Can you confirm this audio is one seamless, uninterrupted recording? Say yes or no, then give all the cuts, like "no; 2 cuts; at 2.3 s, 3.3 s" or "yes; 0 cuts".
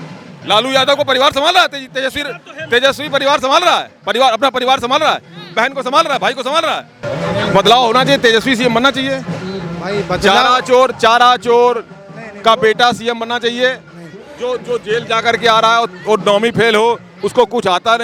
yes; 0 cuts